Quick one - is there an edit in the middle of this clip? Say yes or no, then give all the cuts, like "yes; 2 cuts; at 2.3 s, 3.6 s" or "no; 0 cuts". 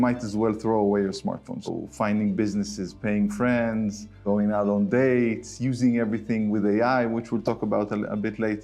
yes; 2 cuts; at 1.5 s, 4.2 s